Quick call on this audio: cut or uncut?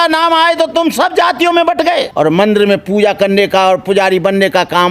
cut